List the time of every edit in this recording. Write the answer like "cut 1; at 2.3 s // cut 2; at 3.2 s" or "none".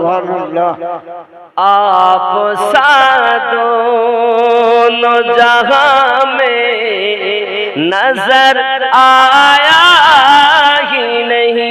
none